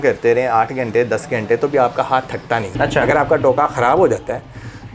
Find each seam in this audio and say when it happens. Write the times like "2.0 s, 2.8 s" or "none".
2.7 s

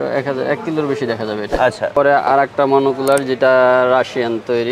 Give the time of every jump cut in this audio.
1.9 s

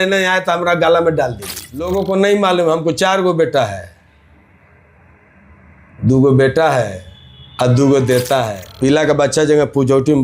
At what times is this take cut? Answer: 1.9 s, 8.6 s

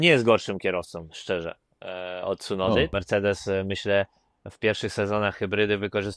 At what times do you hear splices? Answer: 2.9 s

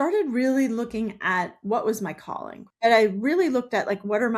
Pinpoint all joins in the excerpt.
2.6 s

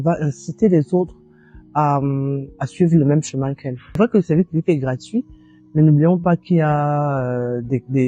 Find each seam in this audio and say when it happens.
3.9 s

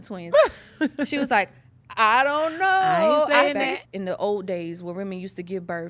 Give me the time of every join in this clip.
3.7 s

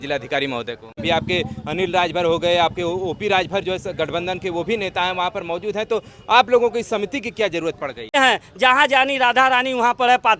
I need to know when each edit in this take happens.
1.0 s, 8.2 s

